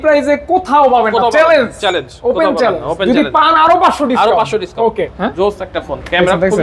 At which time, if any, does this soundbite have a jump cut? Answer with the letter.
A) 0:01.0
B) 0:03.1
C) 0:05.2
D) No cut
C